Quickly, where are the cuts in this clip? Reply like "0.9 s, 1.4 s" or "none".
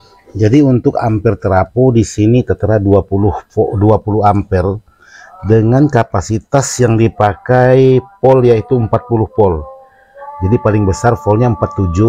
none